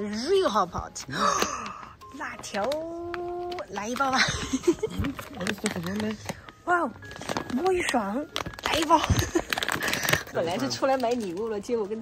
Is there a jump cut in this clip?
yes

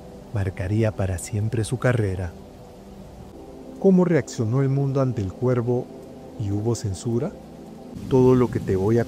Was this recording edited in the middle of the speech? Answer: yes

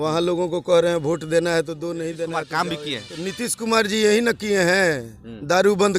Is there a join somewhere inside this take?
yes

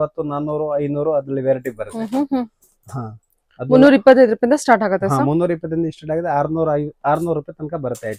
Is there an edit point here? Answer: no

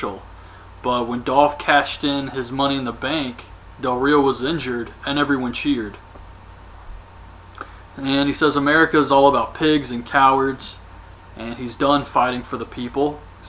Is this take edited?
yes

